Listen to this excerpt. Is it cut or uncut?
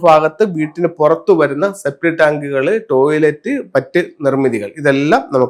uncut